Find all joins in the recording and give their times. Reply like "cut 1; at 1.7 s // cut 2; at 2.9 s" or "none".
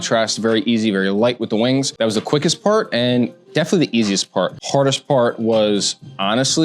cut 1; at 1.9 s // cut 2; at 4.6 s

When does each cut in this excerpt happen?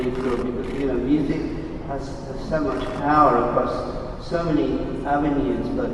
cut 1; at 3.5 s

